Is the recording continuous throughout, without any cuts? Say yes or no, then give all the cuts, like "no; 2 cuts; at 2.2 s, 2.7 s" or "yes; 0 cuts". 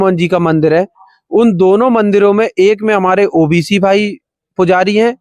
yes; 0 cuts